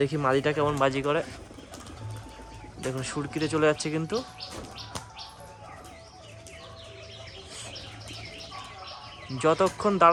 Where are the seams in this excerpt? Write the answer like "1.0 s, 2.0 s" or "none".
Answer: none